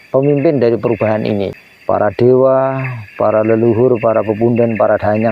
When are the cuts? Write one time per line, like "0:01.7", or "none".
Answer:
0:01.6